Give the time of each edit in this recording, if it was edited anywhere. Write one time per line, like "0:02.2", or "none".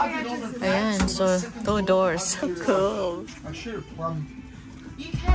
0:02.4